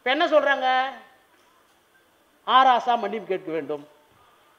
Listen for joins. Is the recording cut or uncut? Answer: uncut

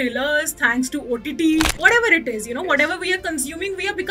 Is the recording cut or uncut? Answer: cut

